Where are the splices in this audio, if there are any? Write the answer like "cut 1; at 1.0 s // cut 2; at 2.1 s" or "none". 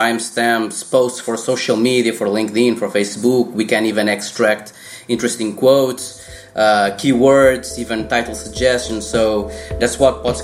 none